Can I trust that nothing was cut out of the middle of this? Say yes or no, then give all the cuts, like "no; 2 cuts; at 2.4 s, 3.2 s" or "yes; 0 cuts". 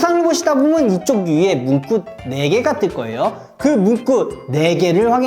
yes; 0 cuts